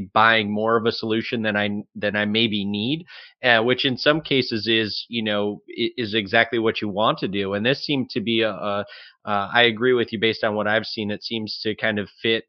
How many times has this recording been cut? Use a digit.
0